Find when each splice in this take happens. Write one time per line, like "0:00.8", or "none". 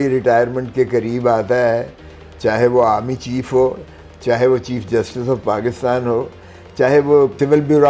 none